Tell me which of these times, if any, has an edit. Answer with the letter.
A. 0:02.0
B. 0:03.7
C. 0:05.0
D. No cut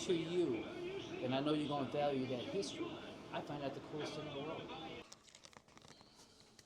C